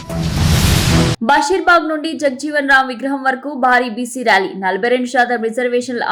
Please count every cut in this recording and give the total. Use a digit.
0